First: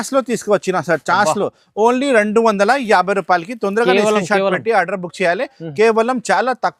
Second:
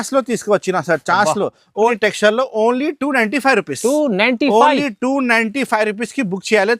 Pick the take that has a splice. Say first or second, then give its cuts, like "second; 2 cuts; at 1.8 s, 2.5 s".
second; 1 cut; at 1.9 s